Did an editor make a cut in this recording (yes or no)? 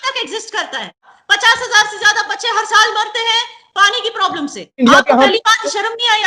yes